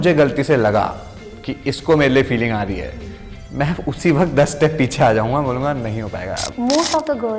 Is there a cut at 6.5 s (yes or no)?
yes